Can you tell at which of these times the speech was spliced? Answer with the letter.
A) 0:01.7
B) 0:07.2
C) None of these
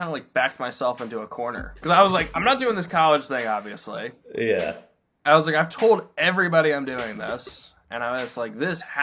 A